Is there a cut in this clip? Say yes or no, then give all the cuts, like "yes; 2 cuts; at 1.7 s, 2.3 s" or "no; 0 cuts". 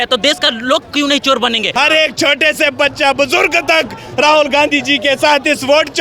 yes; 1 cut; at 1.7 s